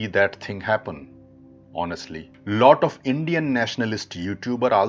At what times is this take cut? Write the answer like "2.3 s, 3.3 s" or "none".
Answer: none